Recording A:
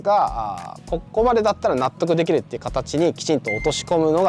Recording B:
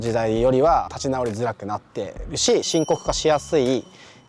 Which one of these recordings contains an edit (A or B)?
B